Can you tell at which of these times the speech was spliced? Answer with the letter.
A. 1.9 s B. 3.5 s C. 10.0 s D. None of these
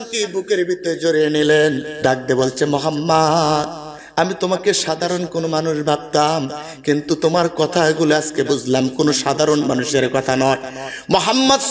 A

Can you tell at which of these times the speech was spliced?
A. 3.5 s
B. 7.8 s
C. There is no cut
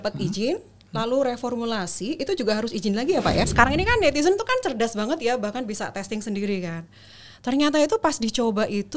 A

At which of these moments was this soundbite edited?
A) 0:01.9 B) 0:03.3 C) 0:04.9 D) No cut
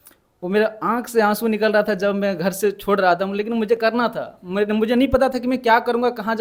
D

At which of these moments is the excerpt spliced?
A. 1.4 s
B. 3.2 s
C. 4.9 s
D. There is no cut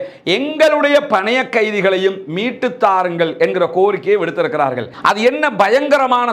C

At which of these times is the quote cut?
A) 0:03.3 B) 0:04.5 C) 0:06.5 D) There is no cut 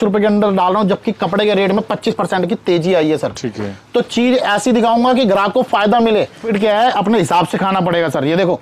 C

